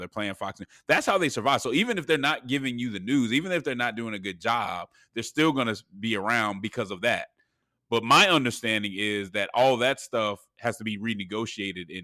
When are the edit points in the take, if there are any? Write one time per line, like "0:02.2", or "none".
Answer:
none

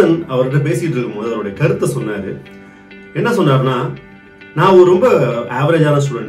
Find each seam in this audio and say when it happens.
none

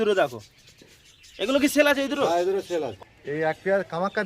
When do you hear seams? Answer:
0:02.9

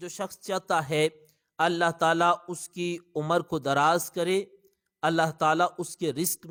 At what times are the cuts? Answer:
none

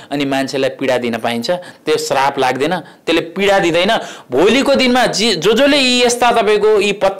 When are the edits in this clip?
none

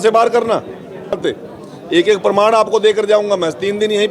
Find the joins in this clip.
0:01.2

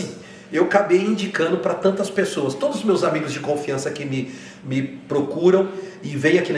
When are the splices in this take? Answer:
none

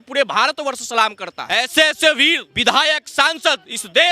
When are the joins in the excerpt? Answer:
0:01.5
0:02.5

